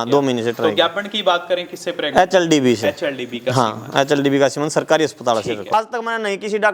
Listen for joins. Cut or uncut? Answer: cut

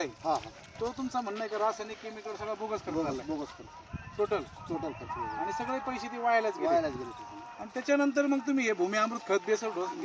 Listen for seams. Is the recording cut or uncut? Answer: uncut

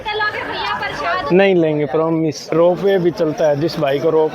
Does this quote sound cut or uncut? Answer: cut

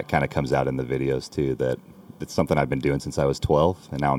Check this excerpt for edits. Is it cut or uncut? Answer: uncut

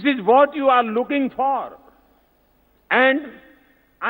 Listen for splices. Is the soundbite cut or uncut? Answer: uncut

